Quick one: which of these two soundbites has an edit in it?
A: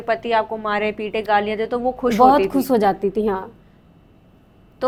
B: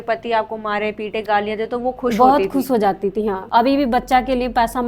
B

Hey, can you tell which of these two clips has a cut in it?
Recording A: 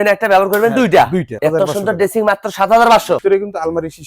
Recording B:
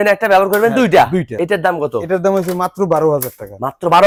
A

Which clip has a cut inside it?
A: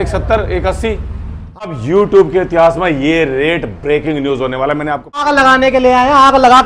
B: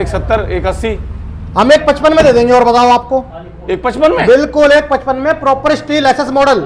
A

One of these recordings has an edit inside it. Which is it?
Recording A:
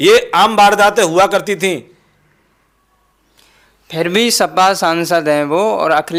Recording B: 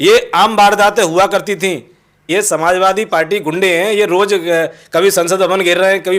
B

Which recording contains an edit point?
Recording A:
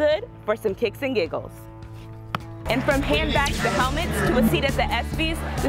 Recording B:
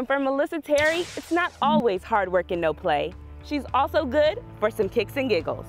A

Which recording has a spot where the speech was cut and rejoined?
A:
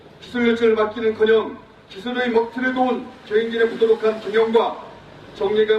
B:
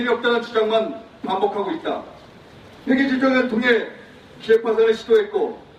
A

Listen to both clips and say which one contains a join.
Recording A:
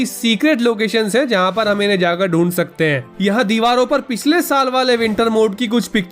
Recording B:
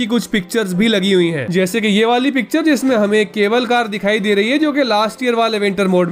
A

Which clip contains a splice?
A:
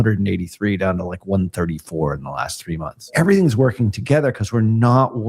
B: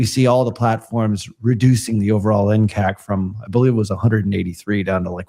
A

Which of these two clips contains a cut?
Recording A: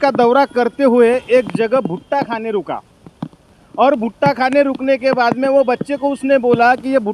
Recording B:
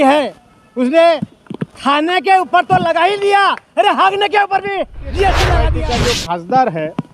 B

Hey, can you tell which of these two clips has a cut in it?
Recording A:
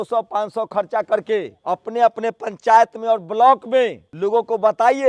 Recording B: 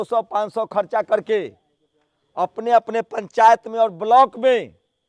A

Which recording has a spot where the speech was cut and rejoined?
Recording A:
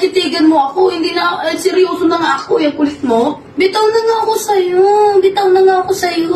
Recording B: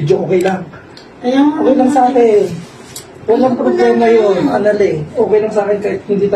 A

